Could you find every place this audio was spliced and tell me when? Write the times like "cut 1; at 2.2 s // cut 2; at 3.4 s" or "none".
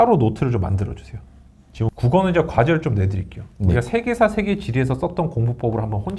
cut 1; at 1.9 s